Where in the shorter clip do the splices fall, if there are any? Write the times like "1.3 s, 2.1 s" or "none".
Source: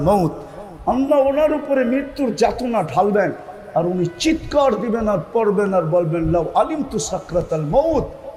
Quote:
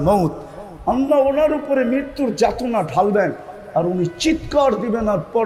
none